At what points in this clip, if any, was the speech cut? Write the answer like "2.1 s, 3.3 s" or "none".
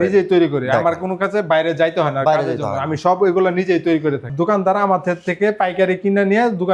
4.3 s